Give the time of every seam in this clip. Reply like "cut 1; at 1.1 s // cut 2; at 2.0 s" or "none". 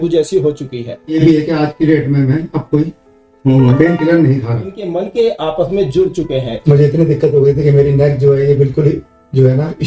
cut 1; at 1.1 s // cut 2; at 4.8 s // cut 3; at 6.6 s

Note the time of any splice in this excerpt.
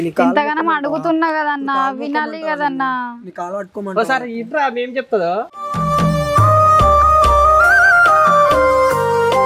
none

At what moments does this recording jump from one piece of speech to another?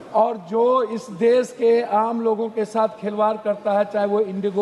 none

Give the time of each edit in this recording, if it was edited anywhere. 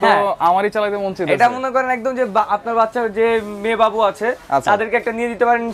none

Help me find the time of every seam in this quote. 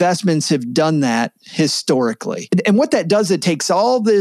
cut 1; at 2.5 s

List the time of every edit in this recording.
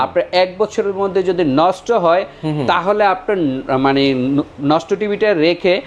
none

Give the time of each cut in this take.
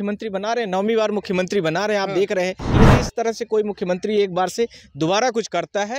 cut 1; at 2.7 s

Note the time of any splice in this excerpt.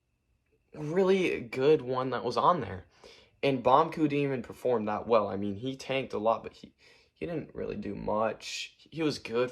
none

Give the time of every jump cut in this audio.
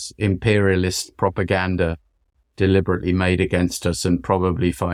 none

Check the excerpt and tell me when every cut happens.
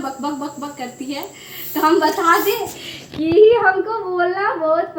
none

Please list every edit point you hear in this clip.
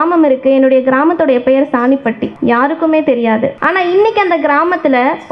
cut 1; at 2.3 s // cut 2; at 3.6 s

